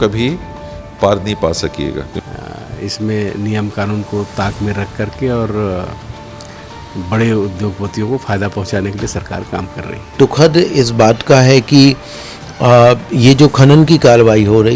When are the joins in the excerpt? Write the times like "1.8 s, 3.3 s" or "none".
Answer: 2.2 s, 10.2 s